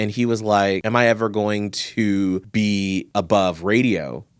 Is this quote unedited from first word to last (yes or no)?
no